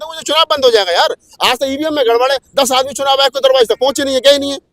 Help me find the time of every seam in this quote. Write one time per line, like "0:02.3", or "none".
none